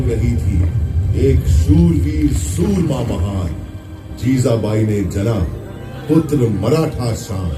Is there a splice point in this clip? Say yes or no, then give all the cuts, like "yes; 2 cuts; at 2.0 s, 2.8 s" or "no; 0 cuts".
no; 0 cuts